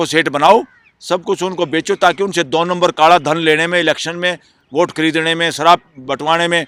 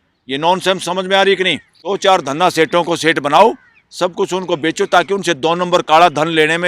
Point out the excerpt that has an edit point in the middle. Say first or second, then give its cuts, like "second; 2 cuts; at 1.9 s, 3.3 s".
second; 1 cut; at 1.7 s